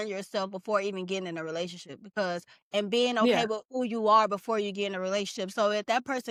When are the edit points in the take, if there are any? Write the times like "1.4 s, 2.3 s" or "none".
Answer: none